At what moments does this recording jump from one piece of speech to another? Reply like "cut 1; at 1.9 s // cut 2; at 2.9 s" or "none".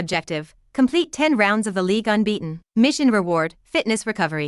cut 1; at 2.6 s